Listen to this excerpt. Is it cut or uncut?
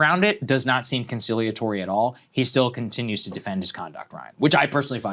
uncut